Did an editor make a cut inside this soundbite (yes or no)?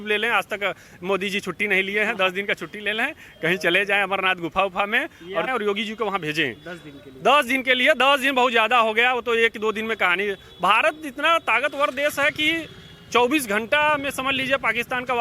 yes